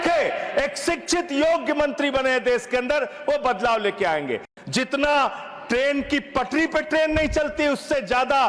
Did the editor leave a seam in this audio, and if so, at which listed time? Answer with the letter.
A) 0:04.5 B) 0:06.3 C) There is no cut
A